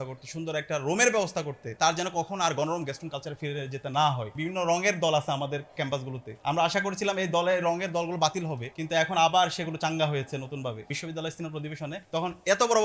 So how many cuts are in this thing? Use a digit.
3